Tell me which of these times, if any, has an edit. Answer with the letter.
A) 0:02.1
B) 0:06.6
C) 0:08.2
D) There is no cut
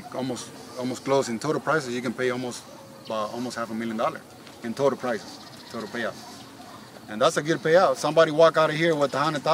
D